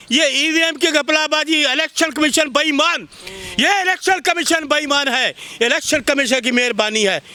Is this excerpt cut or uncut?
uncut